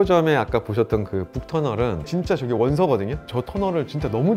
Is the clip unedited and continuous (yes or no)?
no